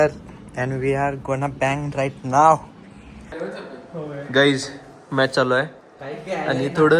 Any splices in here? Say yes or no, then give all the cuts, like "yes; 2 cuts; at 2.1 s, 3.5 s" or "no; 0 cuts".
yes; 1 cut; at 3.1 s